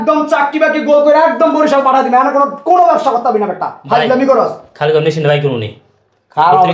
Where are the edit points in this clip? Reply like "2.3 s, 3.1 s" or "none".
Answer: none

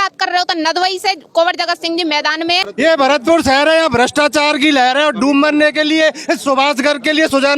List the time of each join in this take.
2.7 s

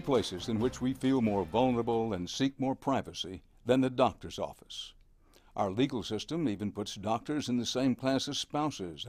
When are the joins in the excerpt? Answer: 4.2 s

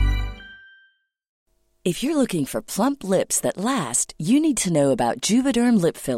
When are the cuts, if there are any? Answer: 1.3 s

